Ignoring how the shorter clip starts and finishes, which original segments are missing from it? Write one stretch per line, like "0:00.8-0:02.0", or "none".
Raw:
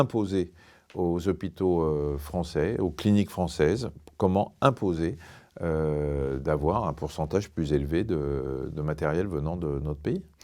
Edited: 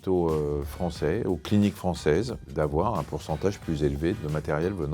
0:04.0-0:06.4
0:08.1-0:08.7